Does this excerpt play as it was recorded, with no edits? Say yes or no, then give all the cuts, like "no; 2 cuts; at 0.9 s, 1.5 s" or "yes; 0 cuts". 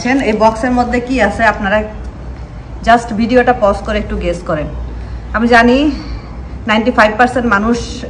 yes; 0 cuts